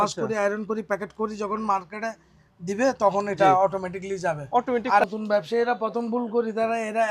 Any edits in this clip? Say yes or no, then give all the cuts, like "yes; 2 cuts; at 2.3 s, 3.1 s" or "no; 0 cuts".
yes; 1 cut; at 5.0 s